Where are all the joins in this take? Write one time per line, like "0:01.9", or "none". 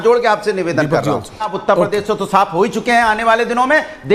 0:01.5